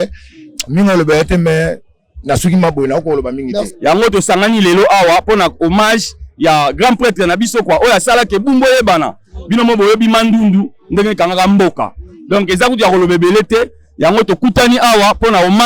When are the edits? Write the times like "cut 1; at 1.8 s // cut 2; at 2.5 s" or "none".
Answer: cut 1; at 3.7 s